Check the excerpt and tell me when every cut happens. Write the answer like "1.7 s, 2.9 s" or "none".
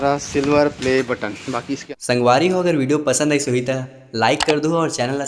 1.8 s